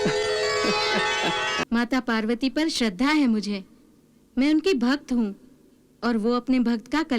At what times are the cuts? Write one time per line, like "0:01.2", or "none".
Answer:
0:01.6